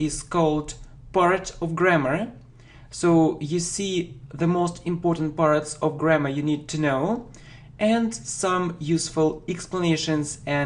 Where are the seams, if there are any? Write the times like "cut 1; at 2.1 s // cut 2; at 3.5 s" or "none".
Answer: cut 1; at 5.0 s